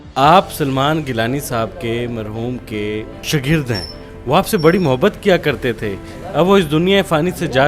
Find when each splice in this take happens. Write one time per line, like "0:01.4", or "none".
0:03.2

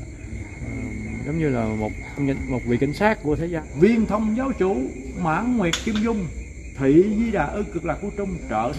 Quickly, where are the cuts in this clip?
0:03.6

